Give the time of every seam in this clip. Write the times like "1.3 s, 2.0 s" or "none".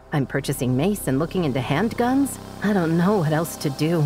2.5 s